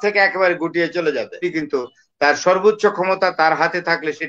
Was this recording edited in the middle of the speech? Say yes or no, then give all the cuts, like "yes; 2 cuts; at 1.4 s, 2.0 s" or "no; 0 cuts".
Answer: yes; 1 cut; at 1.4 s